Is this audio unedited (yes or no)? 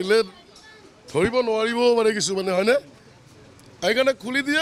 yes